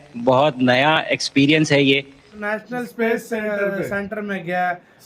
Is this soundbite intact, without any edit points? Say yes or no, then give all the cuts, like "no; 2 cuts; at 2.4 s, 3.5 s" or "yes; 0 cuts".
no; 1 cut; at 2.3 s